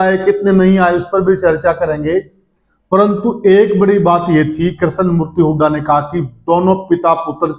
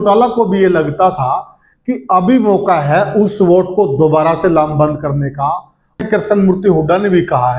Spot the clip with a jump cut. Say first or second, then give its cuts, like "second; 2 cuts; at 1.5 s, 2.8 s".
second; 1 cut; at 6.0 s